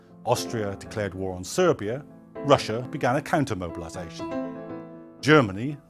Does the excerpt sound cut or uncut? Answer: cut